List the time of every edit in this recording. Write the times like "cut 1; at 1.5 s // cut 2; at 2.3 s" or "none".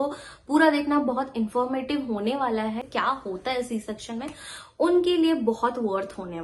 cut 1; at 2.9 s